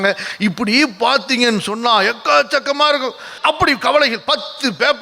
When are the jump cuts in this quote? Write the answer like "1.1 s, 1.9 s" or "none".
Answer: 3.3 s